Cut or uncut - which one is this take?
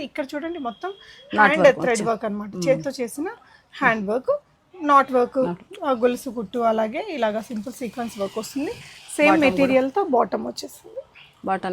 uncut